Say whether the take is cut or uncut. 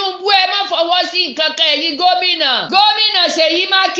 cut